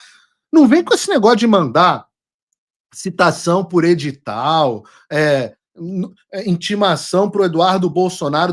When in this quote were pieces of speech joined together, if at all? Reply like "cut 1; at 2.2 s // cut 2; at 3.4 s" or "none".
none

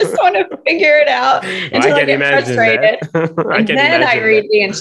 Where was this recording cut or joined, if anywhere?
none

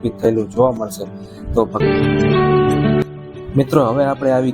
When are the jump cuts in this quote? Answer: cut 1; at 1.8 s

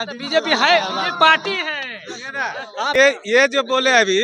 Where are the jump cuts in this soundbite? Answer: cut 1; at 3.0 s

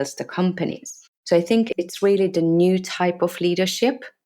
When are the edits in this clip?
cut 1; at 1.7 s

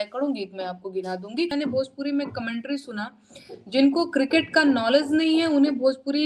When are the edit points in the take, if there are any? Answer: cut 1; at 1.5 s

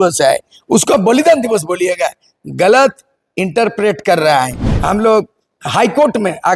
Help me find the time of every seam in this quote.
cut 1; at 4.7 s

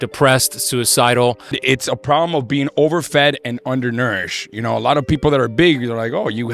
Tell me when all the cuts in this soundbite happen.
cut 1; at 1.6 s

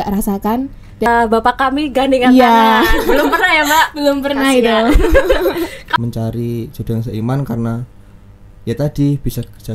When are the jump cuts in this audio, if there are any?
cut 1; at 1.1 s // cut 2; at 5.8 s

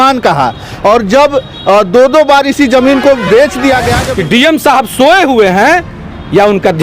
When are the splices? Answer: cut 1; at 4.0 s

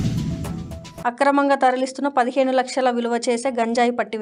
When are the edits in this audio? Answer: none

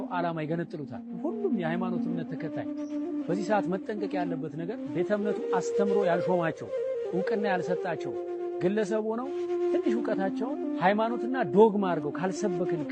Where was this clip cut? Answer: none

